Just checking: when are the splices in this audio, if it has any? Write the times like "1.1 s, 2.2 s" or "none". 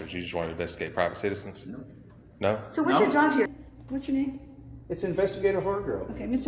3.5 s